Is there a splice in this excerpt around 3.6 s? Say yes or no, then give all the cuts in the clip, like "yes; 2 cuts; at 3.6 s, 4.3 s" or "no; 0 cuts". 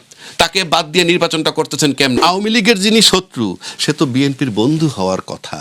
no; 1 cut; at 2.2 s